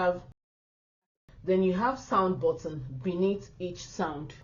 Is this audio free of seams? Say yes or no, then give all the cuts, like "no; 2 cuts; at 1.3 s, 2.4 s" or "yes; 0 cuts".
yes; 0 cuts